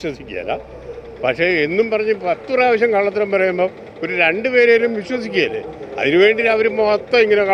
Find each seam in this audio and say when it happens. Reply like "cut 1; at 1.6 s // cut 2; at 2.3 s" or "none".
none